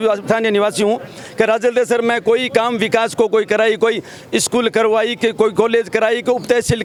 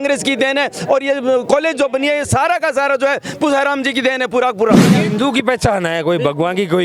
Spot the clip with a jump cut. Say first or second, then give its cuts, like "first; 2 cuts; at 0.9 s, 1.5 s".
second; 1 cut; at 5.0 s